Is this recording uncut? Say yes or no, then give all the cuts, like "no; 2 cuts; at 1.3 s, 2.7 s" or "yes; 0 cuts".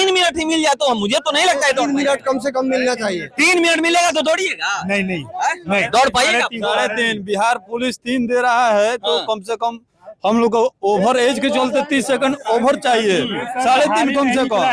yes; 0 cuts